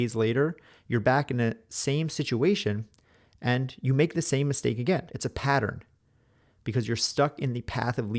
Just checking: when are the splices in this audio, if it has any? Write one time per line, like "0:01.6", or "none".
0:05.1